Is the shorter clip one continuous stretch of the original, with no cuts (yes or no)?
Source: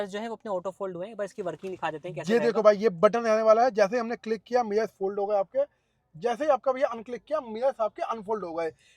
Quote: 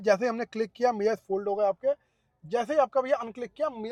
yes